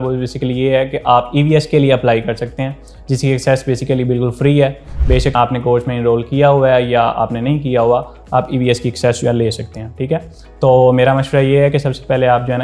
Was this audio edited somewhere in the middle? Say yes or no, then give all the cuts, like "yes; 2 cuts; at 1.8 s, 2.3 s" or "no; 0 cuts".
no; 0 cuts